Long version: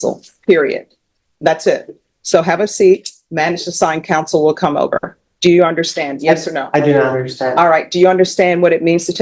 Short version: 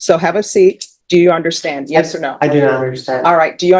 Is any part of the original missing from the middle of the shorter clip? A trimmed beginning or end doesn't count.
yes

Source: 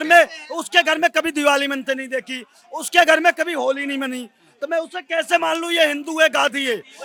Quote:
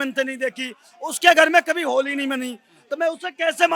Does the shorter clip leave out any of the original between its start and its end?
no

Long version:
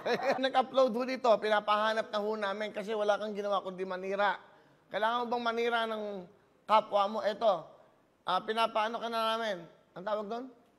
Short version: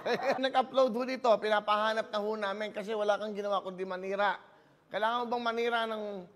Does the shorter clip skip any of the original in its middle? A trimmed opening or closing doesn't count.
no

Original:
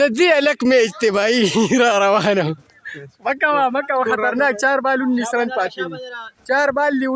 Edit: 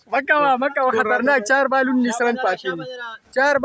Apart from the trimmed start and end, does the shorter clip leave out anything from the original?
no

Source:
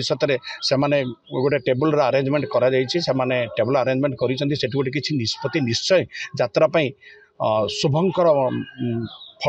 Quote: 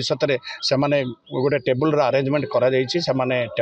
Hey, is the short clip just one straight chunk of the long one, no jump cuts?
yes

